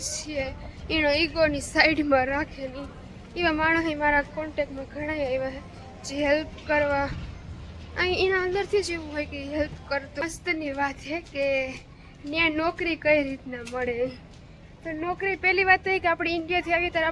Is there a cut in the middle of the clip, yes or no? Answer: yes